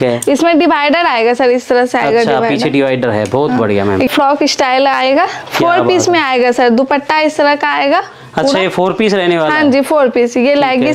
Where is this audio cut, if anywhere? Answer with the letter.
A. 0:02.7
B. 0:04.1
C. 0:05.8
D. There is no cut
B